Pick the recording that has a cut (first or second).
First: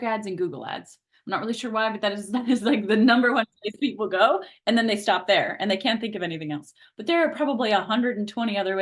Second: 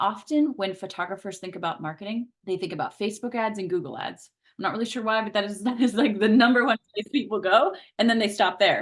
second